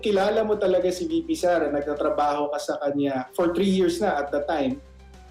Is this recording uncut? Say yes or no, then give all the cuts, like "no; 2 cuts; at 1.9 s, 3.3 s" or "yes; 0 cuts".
yes; 0 cuts